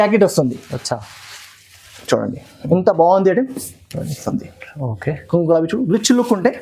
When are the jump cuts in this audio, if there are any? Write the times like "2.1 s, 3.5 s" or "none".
4.2 s